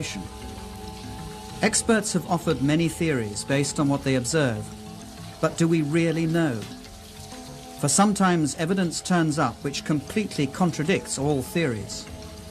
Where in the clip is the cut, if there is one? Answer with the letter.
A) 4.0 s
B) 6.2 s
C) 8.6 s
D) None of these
D